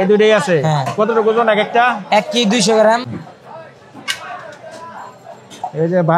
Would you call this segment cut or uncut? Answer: cut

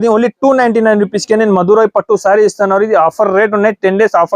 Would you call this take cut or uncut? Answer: uncut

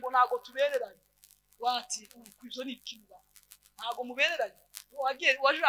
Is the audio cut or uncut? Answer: uncut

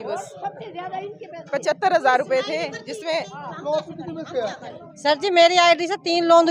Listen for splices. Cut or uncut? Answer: uncut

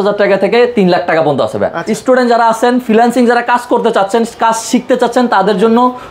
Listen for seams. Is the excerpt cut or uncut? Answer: cut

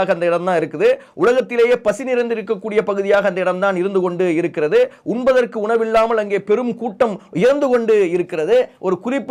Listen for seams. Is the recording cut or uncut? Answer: uncut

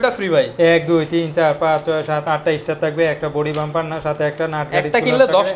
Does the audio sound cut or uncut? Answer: uncut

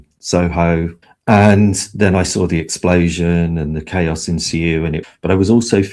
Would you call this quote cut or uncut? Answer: cut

